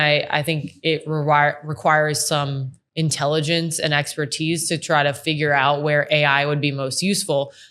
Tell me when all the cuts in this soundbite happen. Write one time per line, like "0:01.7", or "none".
none